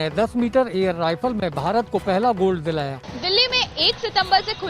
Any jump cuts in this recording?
yes; 1 cut; at 3.0 s

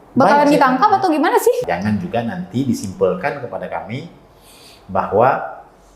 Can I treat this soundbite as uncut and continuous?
no; 1 cut; at 1.7 s

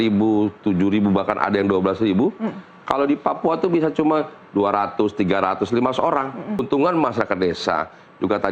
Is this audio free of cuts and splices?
no; 1 cut; at 6.6 s

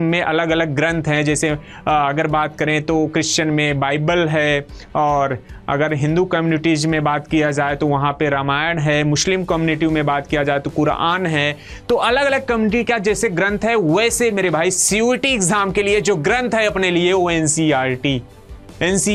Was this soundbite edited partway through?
no; 0 cuts

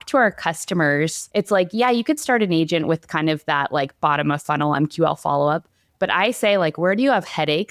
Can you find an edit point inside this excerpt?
yes; 1 cut; at 1.2 s

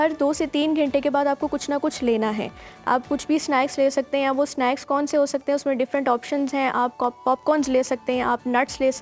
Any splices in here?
no; 0 cuts

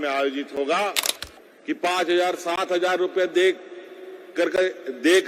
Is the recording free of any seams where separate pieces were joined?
no; 1 cut; at 1.0 s

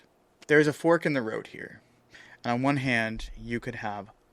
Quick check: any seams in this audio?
no; 0 cuts

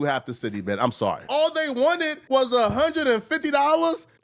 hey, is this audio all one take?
no; 1 cut; at 1.2 s

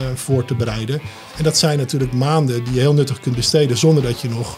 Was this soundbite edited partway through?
no; 0 cuts

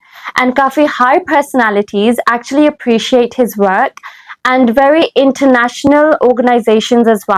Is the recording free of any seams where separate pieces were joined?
yes; 0 cuts

